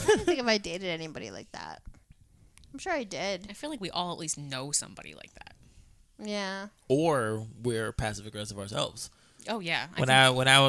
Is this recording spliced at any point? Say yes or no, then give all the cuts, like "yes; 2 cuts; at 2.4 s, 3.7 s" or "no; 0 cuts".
no; 0 cuts